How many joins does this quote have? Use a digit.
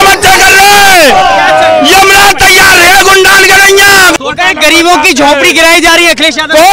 1